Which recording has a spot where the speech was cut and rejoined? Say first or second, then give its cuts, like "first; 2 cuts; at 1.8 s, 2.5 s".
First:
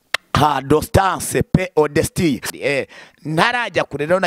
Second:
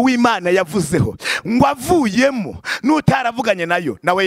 first; 1 cut; at 2.5 s